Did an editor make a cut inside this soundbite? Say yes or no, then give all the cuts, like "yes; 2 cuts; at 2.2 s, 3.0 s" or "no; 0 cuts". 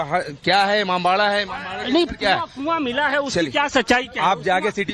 no; 0 cuts